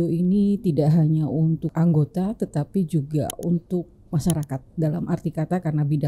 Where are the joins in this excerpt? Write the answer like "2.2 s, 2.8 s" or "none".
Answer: 1.7 s